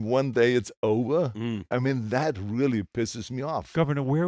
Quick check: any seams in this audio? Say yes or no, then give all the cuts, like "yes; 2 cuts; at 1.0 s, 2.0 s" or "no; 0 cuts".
no; 0 cuts